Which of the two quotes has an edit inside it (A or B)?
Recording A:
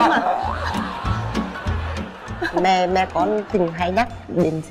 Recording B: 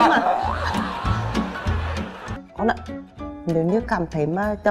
B